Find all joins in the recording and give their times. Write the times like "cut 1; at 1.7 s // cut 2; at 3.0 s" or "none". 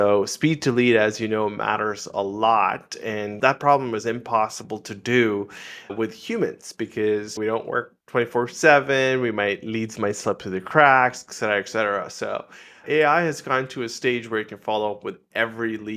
cut 1; at 3.3 s